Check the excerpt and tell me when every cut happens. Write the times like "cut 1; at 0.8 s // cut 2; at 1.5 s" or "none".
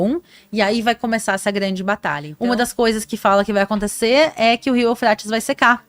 cut 1; at 2.2 s